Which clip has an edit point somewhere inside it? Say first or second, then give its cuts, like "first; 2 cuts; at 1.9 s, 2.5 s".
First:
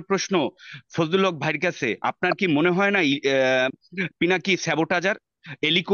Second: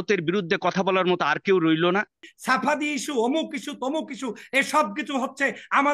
second; 1 cut; at 2.3 s